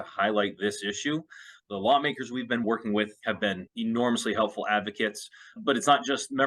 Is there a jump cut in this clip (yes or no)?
yes